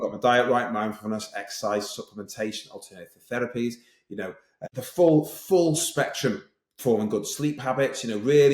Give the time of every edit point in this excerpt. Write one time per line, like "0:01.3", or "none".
0:04.6